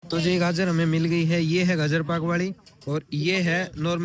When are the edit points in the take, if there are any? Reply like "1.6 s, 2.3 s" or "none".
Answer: none